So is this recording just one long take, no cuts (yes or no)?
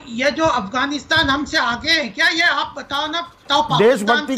no